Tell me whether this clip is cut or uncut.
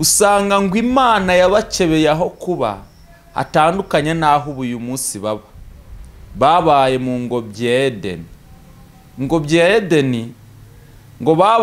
uncut